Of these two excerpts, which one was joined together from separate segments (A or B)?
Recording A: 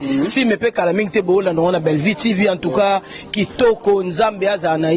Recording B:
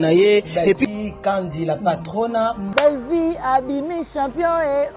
B